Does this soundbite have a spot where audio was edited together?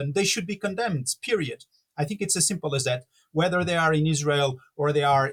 no; 0 cuts

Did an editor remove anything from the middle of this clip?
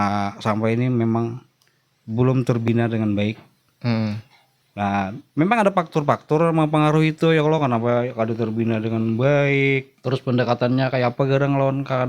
yes; 1 cut; at 9.9 s

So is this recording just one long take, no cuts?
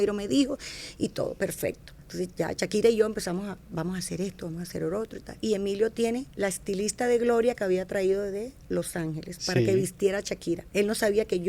no; 2 cuts; at 5.4 s, 10.6 s

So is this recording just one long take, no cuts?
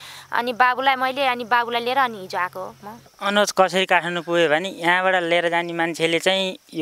no; 1 cut; at 3.1 s

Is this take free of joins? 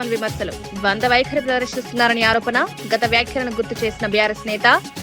yes; 0 cuts

